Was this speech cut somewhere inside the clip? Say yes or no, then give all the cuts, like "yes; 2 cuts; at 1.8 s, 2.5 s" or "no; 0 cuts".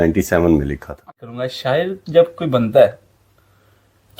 yes; 1 cut; at 1.1 s